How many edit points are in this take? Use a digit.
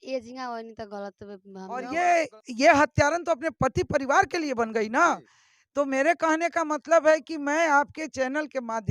1